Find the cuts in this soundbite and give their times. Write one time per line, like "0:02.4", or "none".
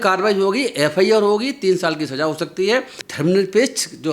0:03.0